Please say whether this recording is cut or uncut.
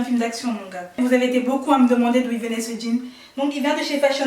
cut